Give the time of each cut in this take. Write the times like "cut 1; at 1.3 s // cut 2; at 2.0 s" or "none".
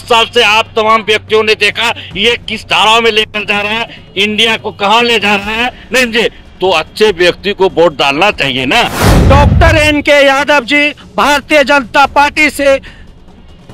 cut 1; at 9.1 s

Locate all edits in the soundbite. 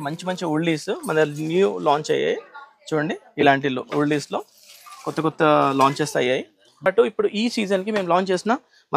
cut 1; at 6.9 s

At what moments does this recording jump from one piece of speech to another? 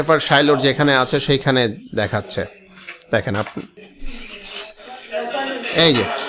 cut 1; at 3.8 s

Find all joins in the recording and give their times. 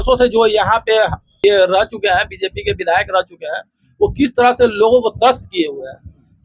cut 1; at 1.4 s

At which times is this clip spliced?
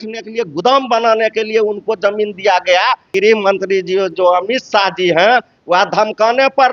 cut 1; at 3.1 s

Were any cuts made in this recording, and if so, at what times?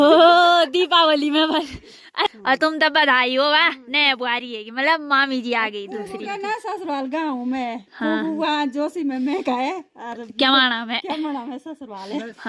cut 1; at 2.3 s

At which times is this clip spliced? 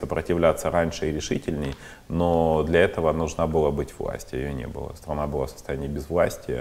none

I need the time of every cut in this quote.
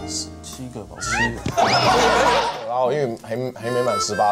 cut 1; at 2.5 s

